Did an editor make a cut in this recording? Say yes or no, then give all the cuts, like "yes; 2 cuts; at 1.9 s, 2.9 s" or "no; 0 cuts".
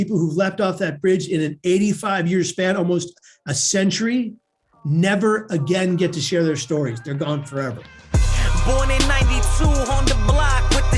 yes; 1 cut; at 7.9 s